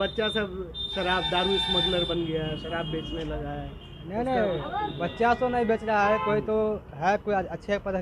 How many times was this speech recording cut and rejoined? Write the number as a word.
zero